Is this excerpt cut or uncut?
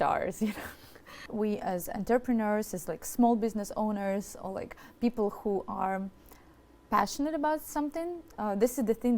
cut